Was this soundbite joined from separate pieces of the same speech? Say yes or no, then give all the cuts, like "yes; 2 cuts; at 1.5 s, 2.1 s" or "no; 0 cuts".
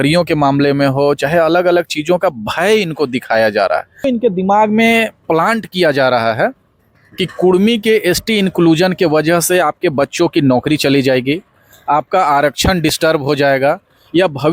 yes; 1 cut; at 4.0 s